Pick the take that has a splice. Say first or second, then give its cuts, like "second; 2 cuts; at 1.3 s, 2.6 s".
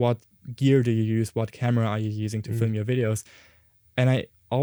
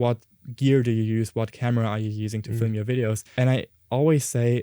second; 1 cut; at 3.2 s